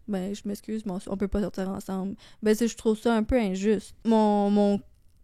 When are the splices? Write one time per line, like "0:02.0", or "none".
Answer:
0:03.9